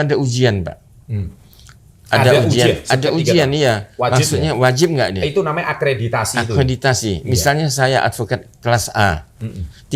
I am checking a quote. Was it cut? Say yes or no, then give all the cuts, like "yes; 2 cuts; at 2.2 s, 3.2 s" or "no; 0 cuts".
no; 0 cuts